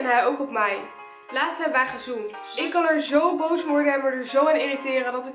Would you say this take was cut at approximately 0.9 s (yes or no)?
no